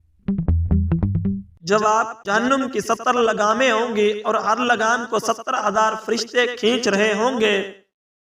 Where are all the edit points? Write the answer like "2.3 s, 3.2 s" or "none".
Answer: 1.5 s